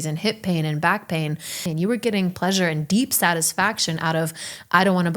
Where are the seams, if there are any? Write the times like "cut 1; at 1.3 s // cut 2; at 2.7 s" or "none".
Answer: cut 1; at 1.7 s